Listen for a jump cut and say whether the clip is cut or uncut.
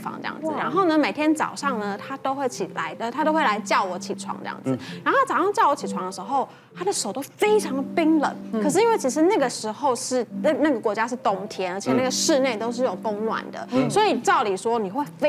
uncut